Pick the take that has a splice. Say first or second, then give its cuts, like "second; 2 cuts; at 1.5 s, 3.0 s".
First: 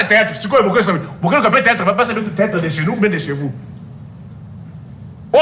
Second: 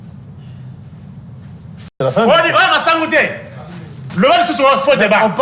second; 1 cut; at 1.9 s